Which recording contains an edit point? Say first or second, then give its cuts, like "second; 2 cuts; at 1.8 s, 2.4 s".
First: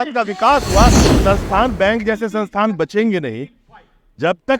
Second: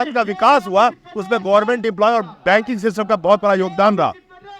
first; 1 cut; at 1.1 s